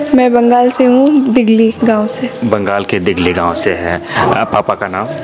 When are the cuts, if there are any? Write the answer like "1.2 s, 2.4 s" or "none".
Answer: none

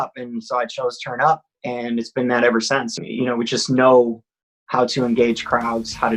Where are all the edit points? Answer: 2.9 s

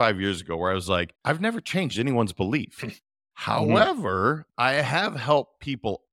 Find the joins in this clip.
1.1 s

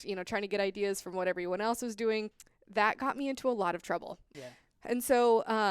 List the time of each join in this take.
2.3 s, 4.2 s

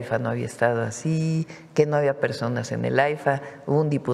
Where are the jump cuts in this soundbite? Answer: none

